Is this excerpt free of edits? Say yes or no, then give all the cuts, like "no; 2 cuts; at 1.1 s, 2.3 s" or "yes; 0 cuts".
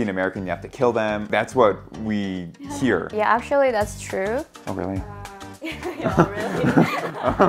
no; 2 cuts; at 1.2 s, 3.1 s